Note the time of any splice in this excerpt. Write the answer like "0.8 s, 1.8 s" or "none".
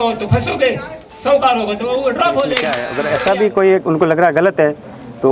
2.9 s